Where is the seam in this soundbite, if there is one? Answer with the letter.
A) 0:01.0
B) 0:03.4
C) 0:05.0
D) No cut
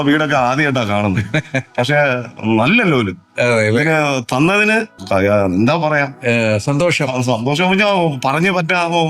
C